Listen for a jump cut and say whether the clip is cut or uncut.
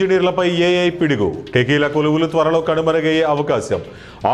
uncut